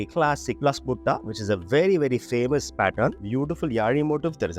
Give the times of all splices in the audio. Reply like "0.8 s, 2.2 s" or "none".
3.2 s